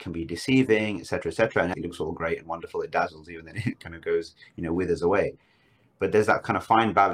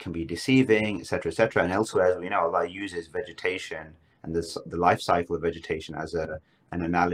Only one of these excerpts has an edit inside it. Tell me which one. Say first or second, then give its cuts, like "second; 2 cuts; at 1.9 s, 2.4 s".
first; 1 cut; at 1.7 s